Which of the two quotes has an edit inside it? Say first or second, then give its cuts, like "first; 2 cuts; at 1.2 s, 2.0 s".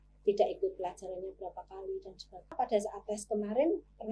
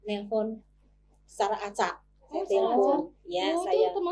first; 1 cut; at 2.5 s